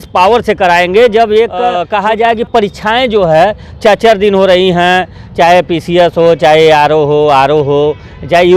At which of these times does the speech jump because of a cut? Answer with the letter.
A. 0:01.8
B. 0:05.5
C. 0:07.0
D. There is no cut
A